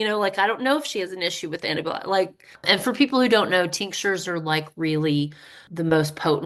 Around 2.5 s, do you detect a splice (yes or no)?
yes